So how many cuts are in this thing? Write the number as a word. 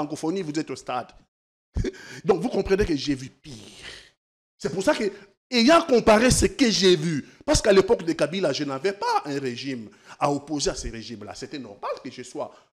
zero